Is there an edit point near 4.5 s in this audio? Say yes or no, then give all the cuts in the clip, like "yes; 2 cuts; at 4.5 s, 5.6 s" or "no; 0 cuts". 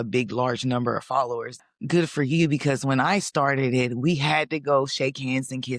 no; 1 cut; at 1.6 s